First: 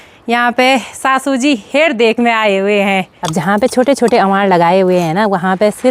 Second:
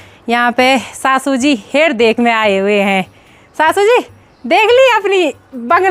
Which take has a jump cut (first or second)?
first